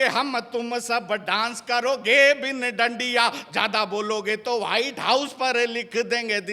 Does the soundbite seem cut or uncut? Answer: uncut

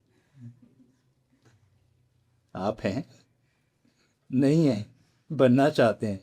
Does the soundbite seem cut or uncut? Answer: uncut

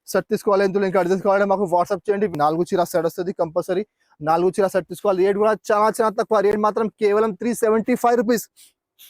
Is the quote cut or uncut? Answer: cut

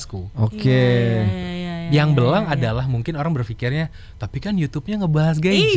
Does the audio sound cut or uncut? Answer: uncut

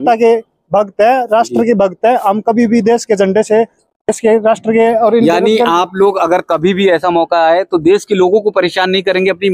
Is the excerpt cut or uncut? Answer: uncut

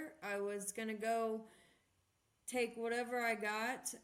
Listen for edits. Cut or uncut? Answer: uncut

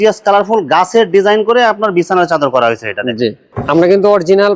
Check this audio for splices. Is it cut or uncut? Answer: cut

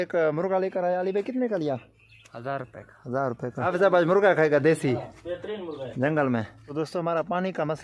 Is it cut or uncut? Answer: cut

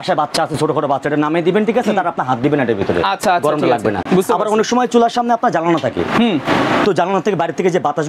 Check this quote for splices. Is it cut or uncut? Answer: uncut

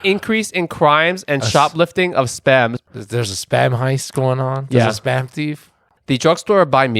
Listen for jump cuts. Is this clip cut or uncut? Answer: cut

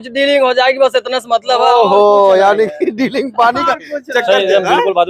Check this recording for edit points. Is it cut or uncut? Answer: uncut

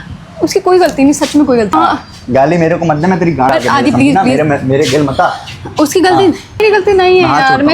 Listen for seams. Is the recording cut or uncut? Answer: cut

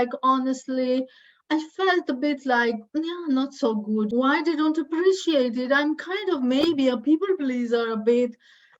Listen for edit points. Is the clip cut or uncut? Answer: cut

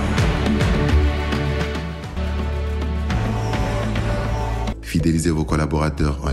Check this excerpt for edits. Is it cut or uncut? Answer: cut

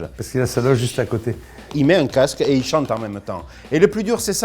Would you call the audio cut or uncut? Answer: cut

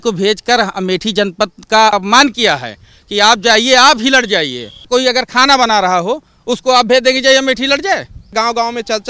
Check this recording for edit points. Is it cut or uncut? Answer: cut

